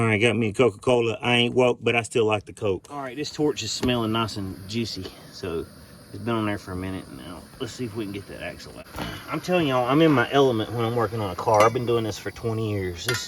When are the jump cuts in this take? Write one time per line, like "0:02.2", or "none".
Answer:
0:03.2
0:08.7